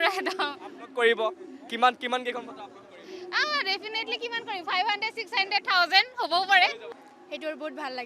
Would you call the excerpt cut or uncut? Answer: cut